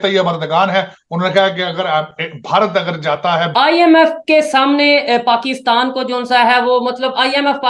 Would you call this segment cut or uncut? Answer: cut